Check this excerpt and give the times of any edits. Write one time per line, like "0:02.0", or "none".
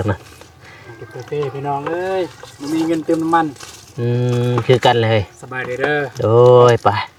none